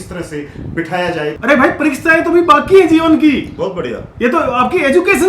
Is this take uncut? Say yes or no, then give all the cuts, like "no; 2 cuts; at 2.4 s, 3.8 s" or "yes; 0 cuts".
no; 1 cut; at 1.4 s